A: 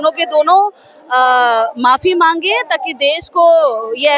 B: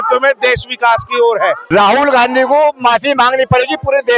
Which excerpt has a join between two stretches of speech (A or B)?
B